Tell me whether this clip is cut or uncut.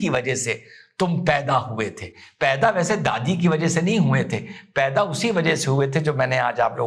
uncut